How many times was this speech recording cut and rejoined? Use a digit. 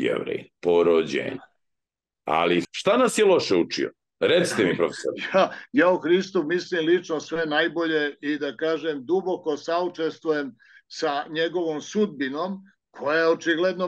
1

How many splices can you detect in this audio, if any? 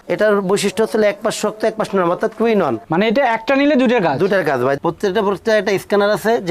1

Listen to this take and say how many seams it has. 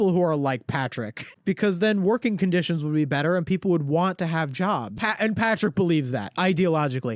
1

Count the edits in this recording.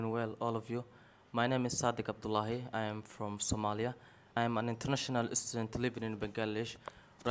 1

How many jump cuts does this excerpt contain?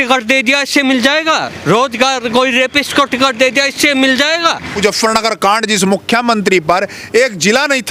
1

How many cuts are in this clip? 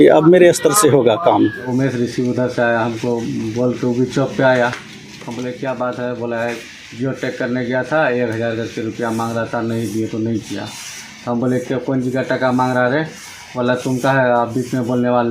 1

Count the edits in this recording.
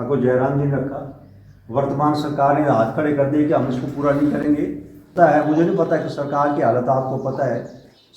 1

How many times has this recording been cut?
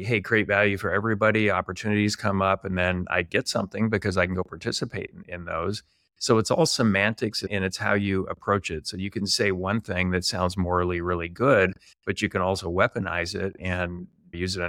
0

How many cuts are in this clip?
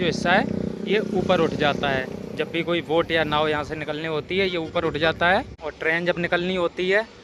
1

